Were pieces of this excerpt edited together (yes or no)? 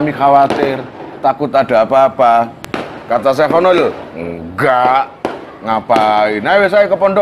no